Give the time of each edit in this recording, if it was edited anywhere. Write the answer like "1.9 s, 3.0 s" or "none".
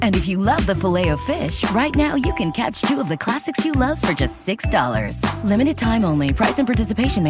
none